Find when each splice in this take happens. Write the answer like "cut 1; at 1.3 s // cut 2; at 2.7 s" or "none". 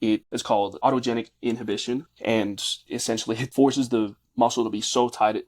cut 1; at 0.8 s // cut 2; at 2.1 s // cut 3; at 3.3 s